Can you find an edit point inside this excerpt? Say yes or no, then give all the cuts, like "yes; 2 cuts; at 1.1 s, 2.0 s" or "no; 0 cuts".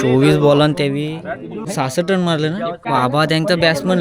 yes; 2 cuts; at 1.5 s, 2.8 s